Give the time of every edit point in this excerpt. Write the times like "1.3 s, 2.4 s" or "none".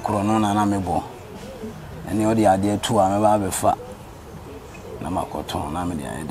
none

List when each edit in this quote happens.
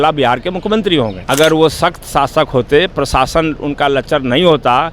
1.2 s

